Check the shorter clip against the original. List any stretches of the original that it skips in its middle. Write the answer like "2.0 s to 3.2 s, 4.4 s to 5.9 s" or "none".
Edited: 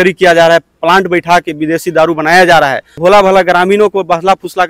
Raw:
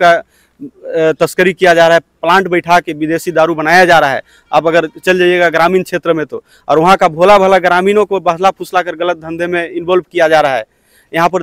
4.4 s to 7.1 s

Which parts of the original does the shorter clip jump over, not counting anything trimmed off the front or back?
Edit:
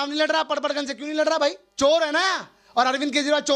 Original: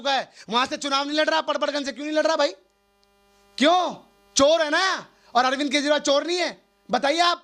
2.6 s to 4.2 s

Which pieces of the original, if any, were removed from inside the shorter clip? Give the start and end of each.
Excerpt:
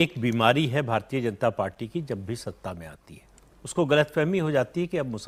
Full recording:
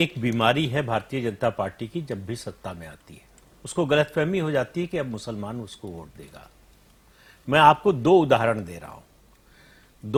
none

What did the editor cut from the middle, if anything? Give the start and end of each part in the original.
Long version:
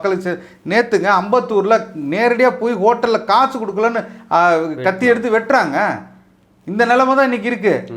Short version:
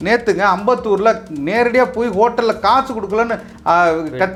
none

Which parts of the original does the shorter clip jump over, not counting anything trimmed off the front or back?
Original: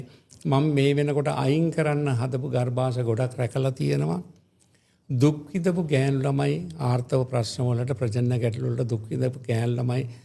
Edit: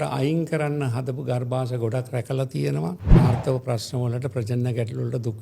4.4 s to 6.8 s

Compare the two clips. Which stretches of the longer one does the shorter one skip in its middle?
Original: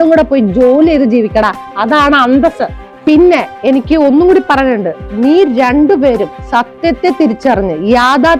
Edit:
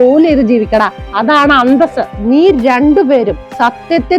2.7 s to 5.0 s

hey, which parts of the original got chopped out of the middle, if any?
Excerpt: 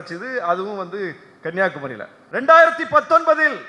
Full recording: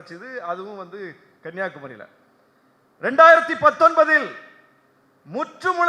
2.1 s to 2.8 s

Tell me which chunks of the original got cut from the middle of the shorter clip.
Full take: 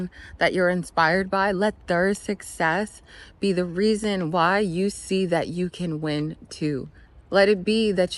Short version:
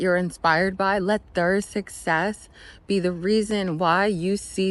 none

